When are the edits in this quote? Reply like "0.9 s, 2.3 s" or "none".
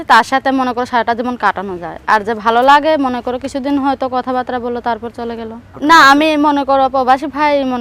5.6 s